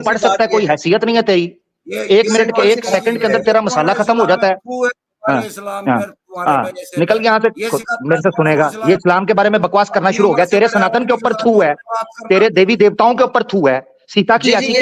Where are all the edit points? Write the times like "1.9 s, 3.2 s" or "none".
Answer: none